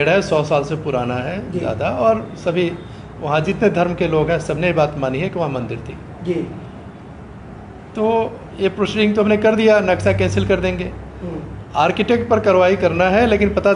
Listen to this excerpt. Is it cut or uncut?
uncut